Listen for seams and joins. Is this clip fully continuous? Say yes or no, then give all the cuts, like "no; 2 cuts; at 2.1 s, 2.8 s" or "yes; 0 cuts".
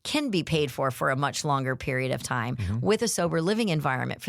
yes; 0 cuts